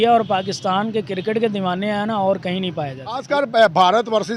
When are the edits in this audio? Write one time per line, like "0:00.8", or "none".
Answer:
0:03.2